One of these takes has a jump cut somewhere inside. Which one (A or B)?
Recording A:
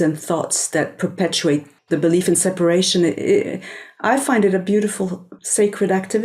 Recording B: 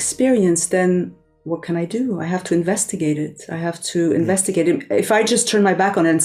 A